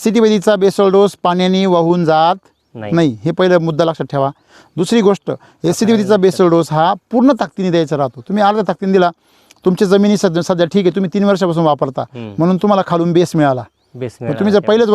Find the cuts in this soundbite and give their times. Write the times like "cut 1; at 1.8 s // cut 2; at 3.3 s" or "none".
none